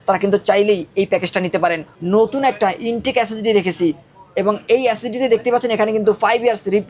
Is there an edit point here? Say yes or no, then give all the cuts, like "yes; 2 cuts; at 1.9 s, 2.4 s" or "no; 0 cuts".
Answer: yes; 1 cut; at 1.9 s